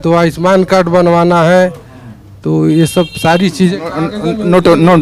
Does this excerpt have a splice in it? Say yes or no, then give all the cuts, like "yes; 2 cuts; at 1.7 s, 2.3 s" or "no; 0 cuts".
no; 0 cuts